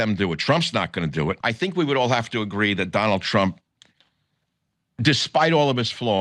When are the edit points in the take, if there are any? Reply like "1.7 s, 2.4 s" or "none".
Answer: 1.4 s